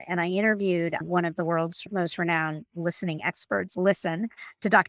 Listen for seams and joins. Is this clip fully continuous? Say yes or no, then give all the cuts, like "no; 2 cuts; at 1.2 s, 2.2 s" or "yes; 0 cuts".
no; 2 cuts; at 1.9 s, 3.7 s